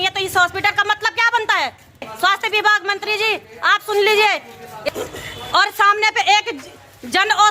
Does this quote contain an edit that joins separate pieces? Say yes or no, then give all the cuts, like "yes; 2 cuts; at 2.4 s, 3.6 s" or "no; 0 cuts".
yes; 2 cuts; at 2.1 s, 4.8 s